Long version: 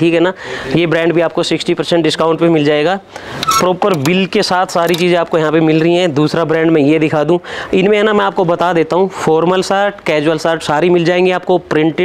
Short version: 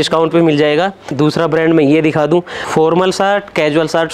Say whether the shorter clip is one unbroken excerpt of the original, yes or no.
no